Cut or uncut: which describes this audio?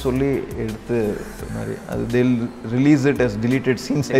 uncut